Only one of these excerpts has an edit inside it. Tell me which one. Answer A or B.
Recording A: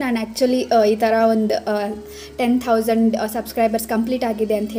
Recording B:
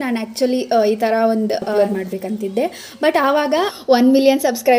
B